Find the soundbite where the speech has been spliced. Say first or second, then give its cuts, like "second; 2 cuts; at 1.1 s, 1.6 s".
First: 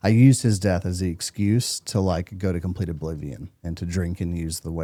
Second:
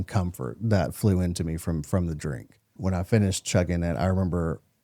second; 1 cut; at 2.7 s